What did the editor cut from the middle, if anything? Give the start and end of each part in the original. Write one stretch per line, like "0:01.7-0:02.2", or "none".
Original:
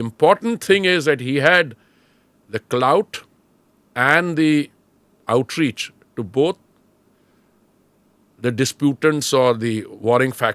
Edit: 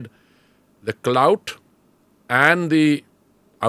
none